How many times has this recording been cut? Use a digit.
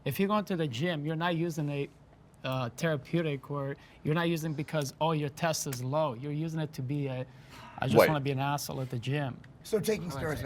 1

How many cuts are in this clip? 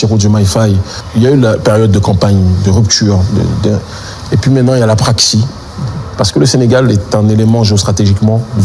1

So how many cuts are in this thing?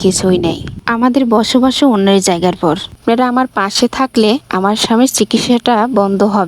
1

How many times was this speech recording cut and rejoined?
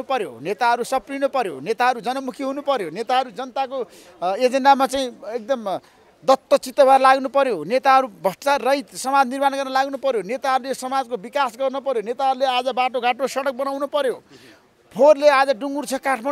0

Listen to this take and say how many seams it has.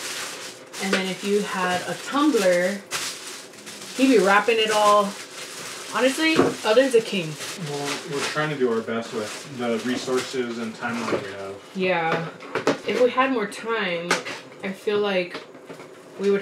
0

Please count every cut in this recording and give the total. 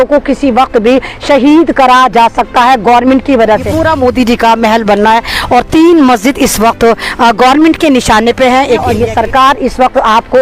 2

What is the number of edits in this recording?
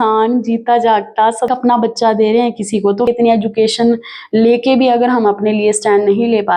2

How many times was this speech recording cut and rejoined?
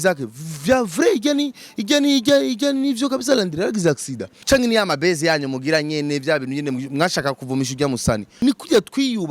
2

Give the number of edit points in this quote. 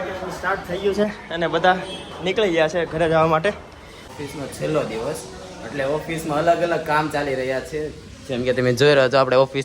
1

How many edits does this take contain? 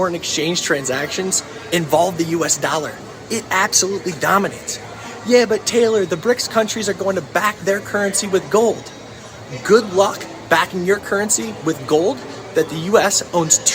2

